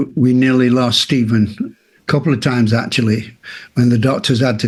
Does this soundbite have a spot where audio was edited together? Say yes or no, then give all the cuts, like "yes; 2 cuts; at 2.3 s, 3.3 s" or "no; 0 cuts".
no; 0 cuts